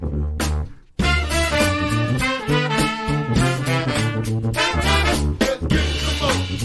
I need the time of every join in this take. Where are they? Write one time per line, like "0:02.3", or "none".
none